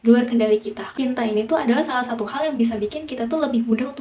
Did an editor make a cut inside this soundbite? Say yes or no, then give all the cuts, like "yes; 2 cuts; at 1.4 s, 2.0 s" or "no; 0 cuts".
yes; 1 cut; at 0.9 s